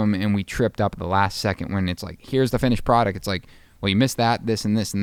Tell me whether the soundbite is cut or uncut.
uncut